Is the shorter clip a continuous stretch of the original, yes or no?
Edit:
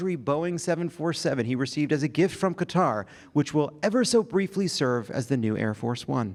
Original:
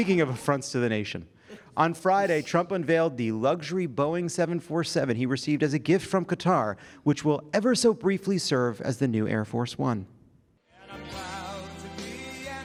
yes